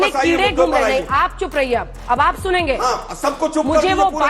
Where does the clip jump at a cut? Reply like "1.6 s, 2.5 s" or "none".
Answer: none